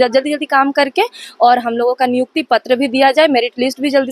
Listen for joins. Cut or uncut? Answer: uncut